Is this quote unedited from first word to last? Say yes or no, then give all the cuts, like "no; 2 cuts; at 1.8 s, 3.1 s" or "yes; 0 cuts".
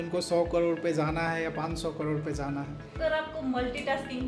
no; 1 cut; at 2.9 s